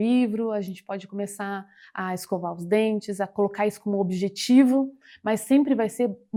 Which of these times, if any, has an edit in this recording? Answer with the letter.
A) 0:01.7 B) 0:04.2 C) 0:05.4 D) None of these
D